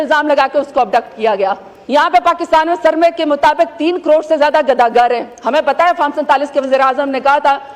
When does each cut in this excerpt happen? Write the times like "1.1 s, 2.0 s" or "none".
1.7 s